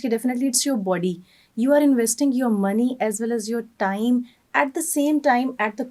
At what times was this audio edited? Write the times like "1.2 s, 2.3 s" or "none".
none